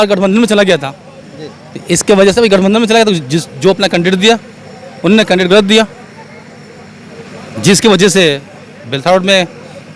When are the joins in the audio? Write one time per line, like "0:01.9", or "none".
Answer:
none